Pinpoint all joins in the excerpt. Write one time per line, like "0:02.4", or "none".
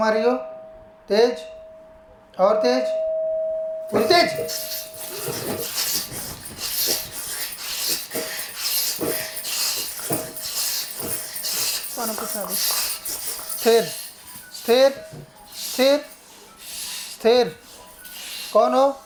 none

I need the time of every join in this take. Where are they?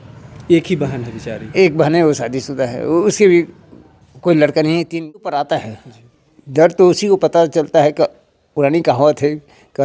0:05.1

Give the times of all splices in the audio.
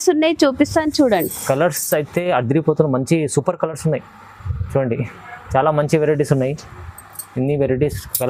none

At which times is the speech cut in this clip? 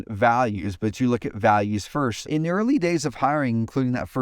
0:02.2

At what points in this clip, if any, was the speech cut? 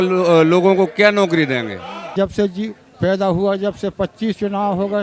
0:01.9

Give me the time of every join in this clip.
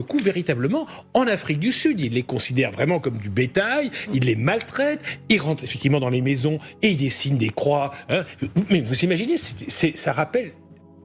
none

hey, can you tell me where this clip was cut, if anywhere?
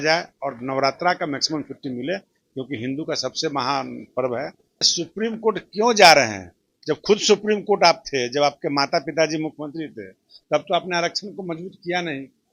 0:04.9

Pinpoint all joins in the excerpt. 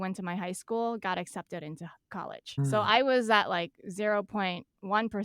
0:02.6

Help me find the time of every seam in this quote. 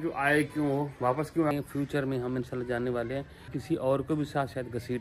0:01.5
0:03.5

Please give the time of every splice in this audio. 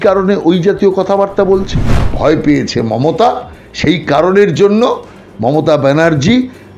0:02.1

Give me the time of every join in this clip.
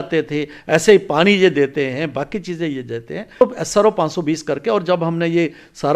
0:03.4

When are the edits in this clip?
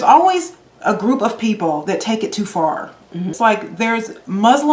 0:03.3

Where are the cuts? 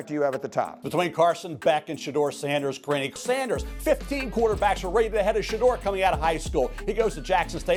none

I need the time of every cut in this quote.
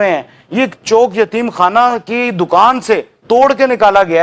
none

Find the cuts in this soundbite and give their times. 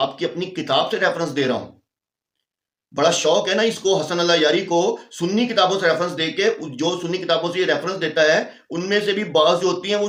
none

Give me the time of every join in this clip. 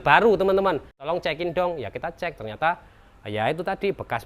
0:00.9

